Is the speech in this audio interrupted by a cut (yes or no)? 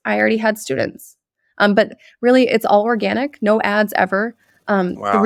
no